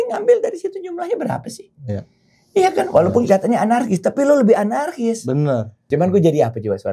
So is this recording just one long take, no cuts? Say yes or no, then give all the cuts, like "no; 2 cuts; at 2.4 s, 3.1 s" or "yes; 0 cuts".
no; 1 cut; at 5.8 s